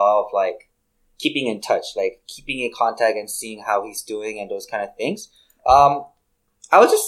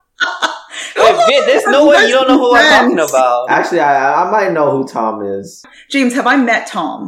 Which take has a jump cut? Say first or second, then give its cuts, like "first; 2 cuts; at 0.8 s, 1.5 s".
second; 1 cut; at 5.7 s